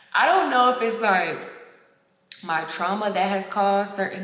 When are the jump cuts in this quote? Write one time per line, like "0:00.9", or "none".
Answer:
none